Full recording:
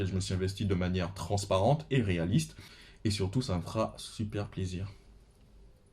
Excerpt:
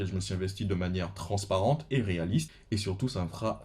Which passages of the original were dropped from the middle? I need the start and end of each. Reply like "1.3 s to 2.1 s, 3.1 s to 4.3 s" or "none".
2.6 s to 2.9 s